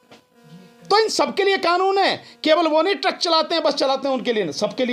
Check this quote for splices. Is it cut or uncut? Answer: uncut